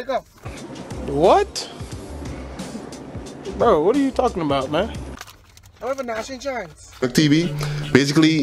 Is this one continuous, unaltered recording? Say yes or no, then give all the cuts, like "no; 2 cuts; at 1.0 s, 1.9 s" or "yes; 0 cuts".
no; 1 cut; at 7.0 s